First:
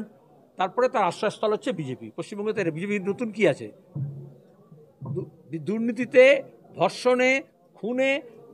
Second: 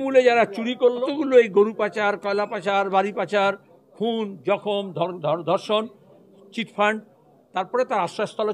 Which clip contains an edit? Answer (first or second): second